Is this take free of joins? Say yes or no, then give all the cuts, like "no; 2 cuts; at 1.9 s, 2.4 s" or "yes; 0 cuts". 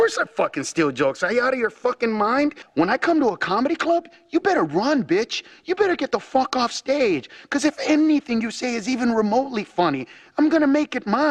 yes; 0 cuts